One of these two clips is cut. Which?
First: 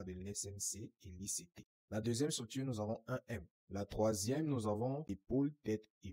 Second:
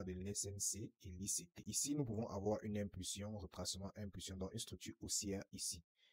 first; 2 cuts; at 1.5 s, 3.5 s

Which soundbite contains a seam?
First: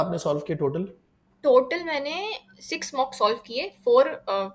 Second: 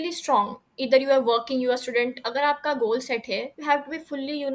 second; 1 cut; at 3.5 s

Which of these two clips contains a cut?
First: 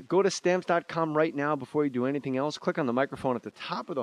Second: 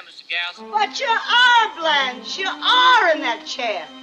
second; 1 cut; at 1.8 s

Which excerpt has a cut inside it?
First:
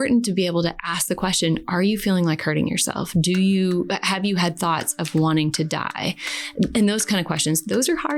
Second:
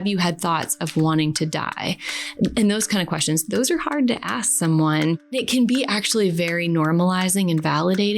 second; 1 cut; at 5.3 s

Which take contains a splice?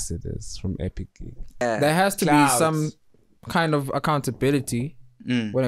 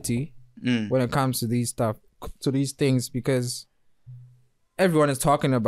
first; 1 cut; at 1.6 s

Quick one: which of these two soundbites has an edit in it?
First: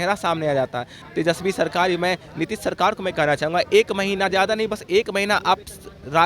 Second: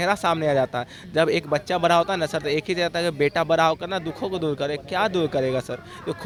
first; 1 cut; at 1.0 s

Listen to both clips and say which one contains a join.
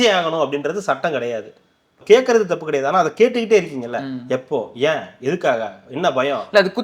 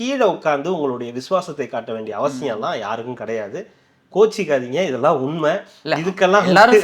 first; 1 cut; at 2.0 s

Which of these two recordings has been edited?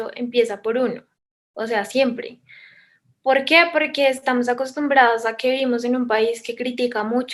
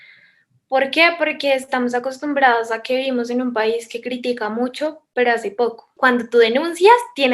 second; 1 cut; at 5.9 s

